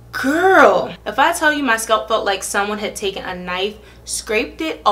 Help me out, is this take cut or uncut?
cut